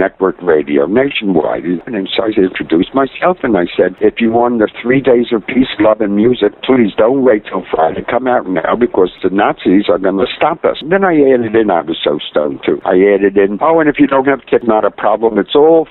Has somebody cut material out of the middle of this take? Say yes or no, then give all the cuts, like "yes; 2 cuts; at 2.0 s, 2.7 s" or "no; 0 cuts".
yes; 3 cuts; at 1.8 s, 9.2 s, 10.8 s